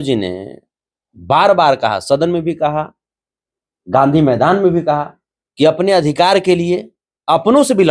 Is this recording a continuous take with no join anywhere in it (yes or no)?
yes